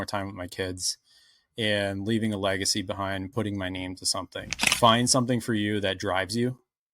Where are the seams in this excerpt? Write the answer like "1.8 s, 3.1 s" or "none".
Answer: 4.6 s